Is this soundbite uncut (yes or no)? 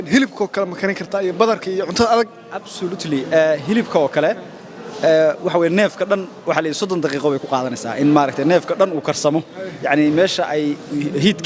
yes